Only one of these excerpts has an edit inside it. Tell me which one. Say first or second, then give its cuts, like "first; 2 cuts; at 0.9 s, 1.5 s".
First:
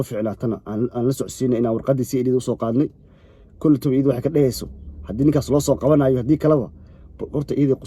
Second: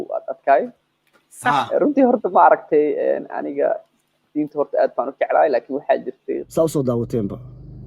second; 1 cut; at 6.4 s